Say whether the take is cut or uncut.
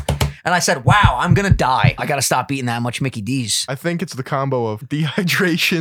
cut